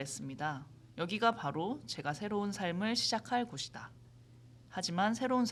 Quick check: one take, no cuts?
yes; 0 cuts

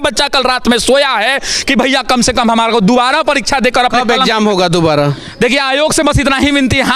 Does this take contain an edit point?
no; 0 cuts

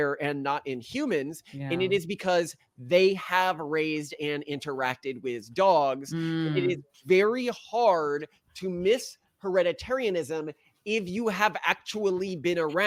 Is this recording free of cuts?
yes; 0 cuts

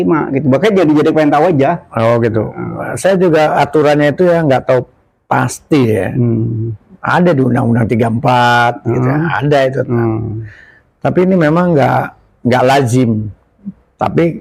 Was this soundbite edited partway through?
no; 0 cuts

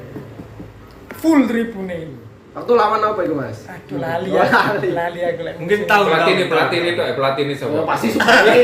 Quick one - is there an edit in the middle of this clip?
no; 0 cuts

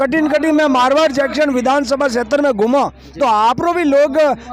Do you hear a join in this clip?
no; 0 cuts

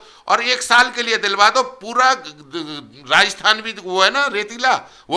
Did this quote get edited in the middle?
no; 0 cuts

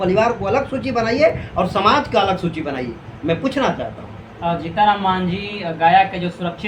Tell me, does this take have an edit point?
no; 0 cuts

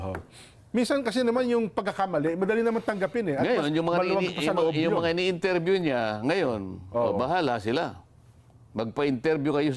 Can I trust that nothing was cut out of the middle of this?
yes; 0 cuts

